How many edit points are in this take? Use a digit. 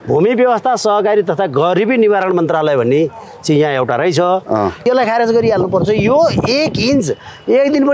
1